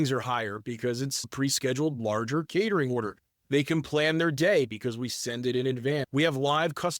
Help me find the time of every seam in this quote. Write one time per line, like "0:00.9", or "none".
0:01.3